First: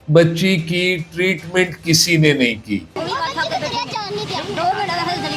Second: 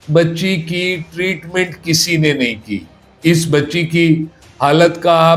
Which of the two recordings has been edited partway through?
first; 1 cut; at 3.0 s

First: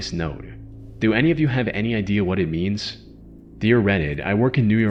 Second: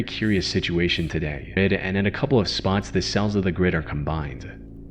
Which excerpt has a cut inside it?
second; 1 cut; at 1.6 s

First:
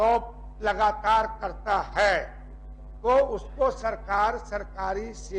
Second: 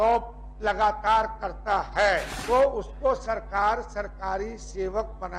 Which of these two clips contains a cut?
second; 1 cut; at 2.3 s

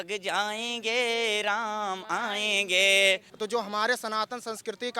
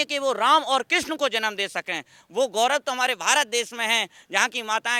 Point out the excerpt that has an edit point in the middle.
first; 1 cut; at 3.3 s

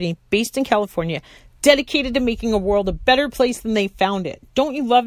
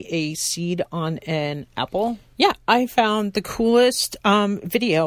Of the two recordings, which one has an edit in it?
second; 1 cut; at 2.2 s

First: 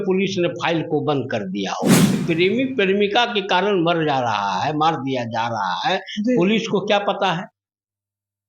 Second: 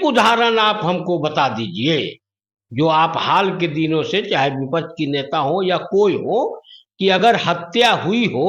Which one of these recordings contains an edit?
first; 1 cut; at 2.2 s

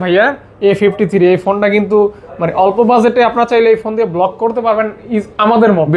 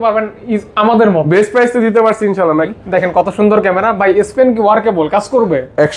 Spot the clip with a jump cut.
second; 1 cut; at 2.7 s

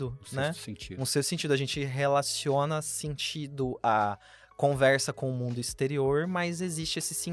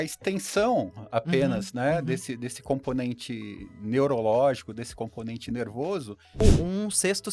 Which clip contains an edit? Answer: second; 1 cut; at 6.4 s

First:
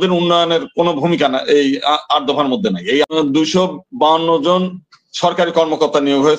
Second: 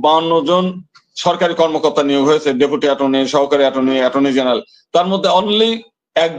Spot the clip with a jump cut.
first; 1 cut; at 3.0 s

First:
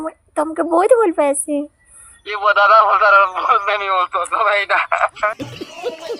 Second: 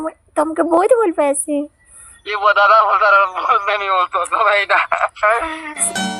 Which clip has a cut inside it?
first; 1 cut; at 5.3 s

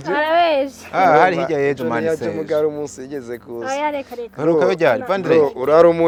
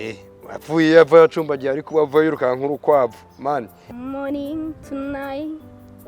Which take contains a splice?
second; 1 cut; at 3.8 s

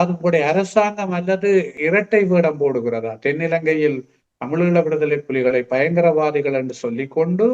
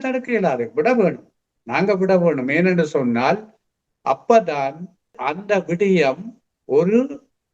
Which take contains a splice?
first; 1 cut; at 1.7 s

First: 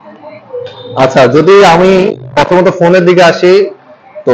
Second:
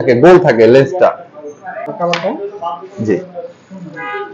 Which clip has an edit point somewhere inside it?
second; 1 cut; at 1.8 s

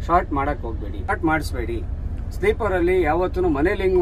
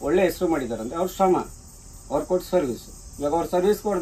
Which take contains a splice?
first; 1 cut; at 1.1 s

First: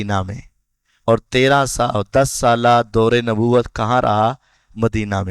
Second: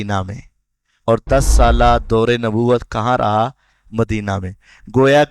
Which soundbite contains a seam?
second; 1 cut; at 1.2 s

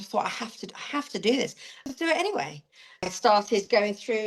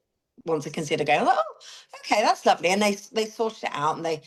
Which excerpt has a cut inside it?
first; 2 cuts; at 1.8 s, 3.1 s

